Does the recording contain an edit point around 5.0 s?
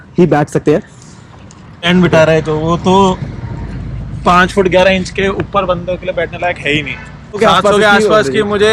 no; 2 cuts; at 1.9 s, 7.3 s

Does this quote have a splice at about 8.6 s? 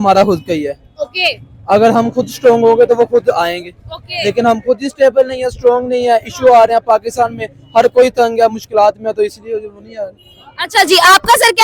no; 0 cuts

